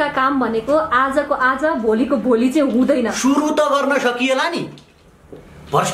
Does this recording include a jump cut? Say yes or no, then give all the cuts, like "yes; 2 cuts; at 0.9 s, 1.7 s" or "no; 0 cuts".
no; 0 cuts